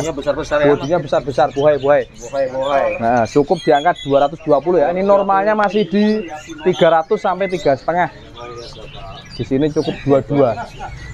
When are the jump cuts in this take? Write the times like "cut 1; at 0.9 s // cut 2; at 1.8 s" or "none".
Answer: none